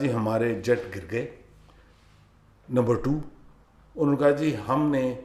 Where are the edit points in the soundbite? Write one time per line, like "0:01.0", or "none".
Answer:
none